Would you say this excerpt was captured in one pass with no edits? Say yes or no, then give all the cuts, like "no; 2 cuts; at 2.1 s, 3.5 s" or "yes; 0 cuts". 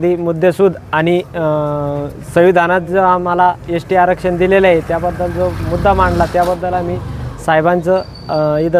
yes; 0 cuts